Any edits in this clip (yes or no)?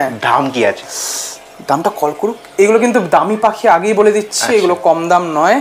no